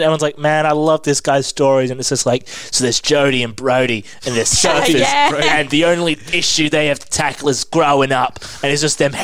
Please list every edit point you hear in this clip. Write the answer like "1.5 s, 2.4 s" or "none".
none

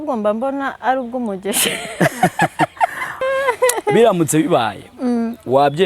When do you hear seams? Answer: 3.2 s

